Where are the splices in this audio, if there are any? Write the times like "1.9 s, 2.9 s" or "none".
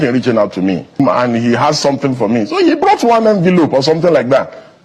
1.0 s